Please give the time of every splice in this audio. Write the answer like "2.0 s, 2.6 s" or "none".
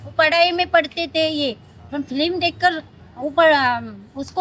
none